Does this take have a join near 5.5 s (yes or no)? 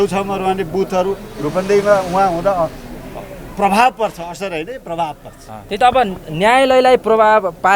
yes